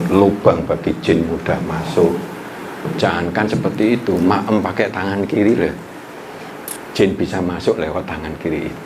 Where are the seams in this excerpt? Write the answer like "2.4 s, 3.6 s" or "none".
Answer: none

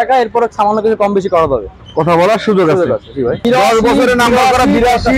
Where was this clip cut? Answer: 3.4 s

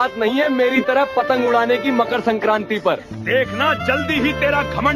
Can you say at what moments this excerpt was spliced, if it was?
0.9 s

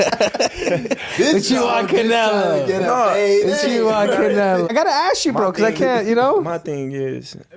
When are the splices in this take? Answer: none

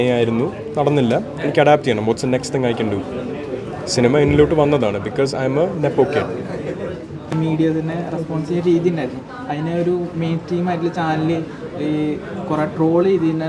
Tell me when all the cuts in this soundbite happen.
none

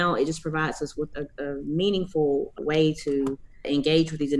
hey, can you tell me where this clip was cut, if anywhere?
1.1 s, 2.5 s, 3.5 s

